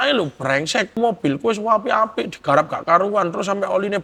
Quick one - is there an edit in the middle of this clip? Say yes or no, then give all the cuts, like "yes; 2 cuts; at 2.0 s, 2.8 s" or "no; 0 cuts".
yes; 1 cut; at 1.0 s